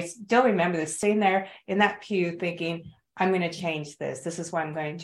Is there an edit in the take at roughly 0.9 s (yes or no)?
yes